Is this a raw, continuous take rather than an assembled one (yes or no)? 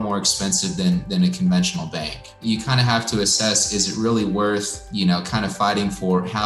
no